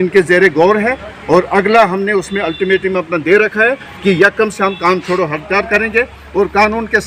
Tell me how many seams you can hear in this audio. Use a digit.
0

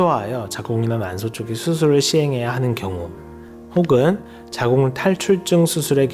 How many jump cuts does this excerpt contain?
0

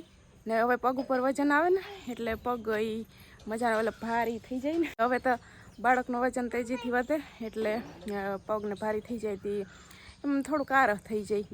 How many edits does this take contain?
1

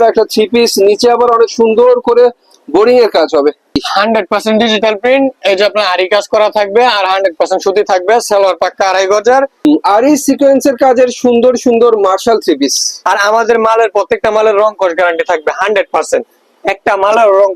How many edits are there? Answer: 3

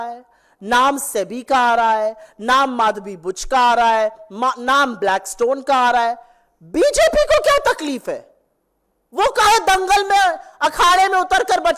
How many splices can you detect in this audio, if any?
0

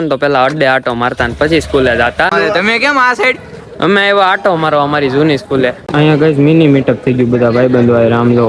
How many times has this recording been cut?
2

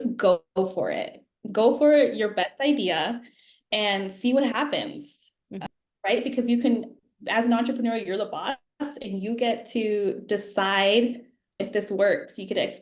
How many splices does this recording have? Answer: 2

